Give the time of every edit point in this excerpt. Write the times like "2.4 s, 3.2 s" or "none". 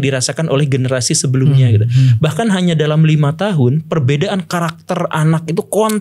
none